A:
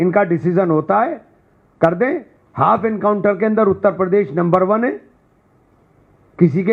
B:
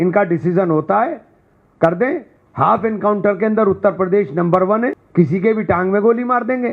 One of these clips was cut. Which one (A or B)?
B